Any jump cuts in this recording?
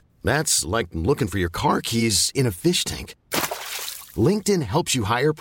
no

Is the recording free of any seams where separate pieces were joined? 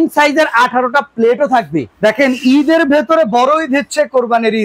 yes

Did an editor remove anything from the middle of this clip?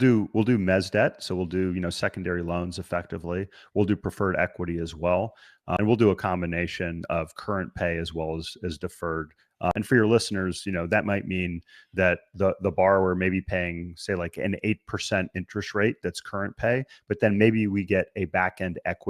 yes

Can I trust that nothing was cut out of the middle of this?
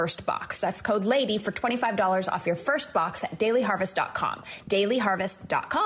yes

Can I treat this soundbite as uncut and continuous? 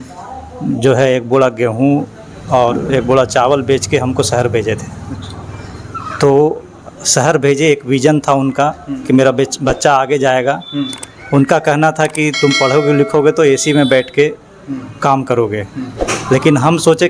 yes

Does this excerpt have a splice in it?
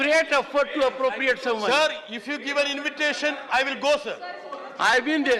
no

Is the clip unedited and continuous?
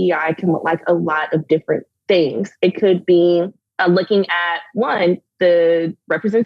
no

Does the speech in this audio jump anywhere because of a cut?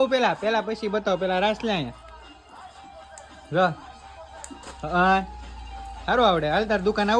no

